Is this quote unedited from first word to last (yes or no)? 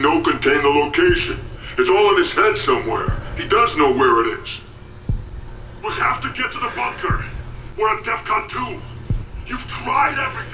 yes